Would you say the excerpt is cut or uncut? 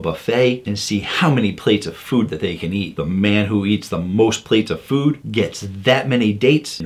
uncut